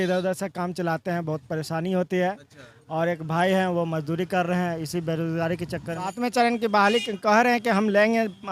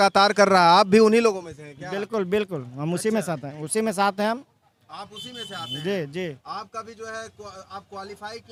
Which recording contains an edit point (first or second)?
first